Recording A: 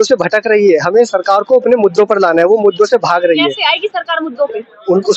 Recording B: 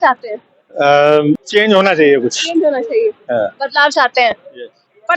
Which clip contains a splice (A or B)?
B